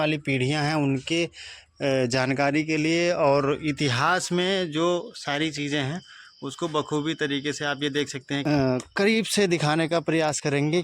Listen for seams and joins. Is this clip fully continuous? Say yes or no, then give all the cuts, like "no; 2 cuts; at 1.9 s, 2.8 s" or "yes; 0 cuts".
no; 1 cut; at 8.4 s